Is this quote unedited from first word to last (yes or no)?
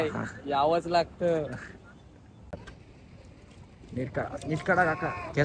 no